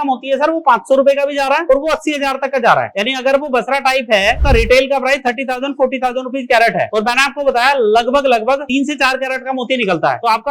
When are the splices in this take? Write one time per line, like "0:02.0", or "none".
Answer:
0:04.4

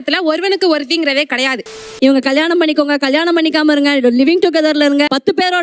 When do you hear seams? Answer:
0:01.8

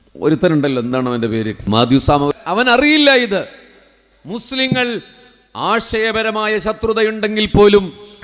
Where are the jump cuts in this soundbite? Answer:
0:01.7
0:02.3

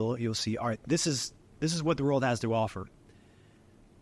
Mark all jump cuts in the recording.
none

